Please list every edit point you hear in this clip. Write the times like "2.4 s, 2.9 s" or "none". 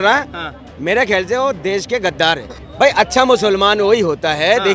2.6 s